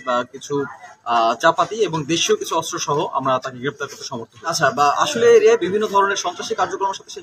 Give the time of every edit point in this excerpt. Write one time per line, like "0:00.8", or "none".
0:04.4